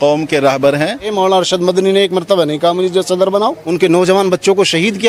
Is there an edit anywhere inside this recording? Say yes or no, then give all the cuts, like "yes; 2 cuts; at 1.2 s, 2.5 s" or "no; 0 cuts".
no; 0 cuts